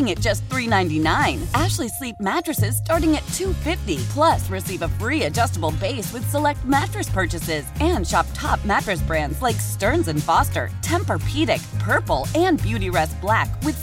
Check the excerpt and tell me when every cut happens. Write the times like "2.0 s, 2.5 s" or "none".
none